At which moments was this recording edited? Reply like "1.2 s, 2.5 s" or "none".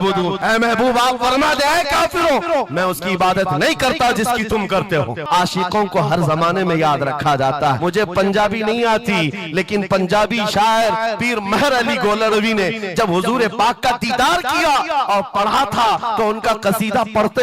5.2 s, 7.8 s